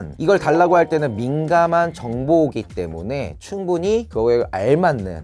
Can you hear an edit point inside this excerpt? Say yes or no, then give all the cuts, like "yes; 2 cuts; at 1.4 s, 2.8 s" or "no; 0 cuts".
no; 0 cuts